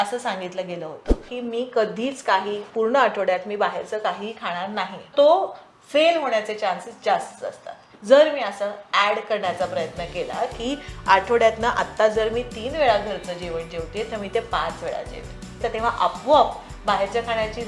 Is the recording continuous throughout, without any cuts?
no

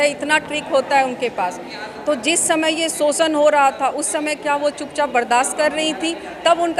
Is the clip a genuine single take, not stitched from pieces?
yes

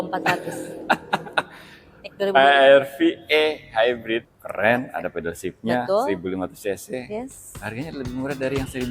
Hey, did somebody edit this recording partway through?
yes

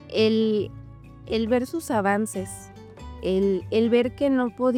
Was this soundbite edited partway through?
no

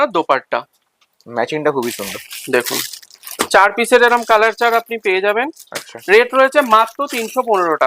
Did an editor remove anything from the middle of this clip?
no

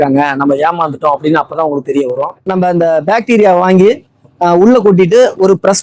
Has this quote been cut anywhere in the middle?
yes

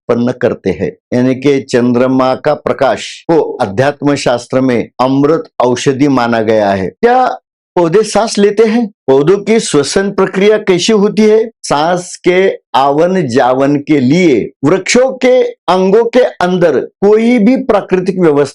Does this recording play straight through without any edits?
no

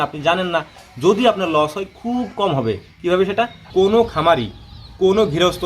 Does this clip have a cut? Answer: yes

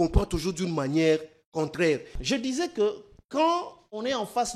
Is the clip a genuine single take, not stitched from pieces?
no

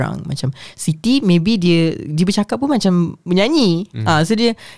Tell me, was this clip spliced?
no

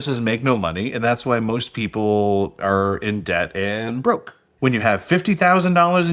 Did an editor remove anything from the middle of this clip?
yes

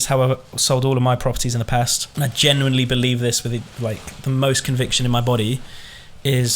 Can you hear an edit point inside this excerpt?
yes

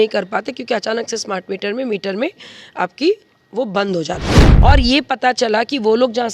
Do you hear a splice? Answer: yes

